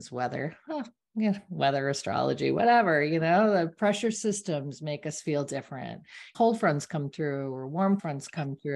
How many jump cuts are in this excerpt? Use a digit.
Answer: 2